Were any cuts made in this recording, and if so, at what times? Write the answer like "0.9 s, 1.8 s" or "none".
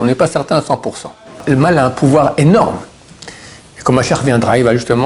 1.4 s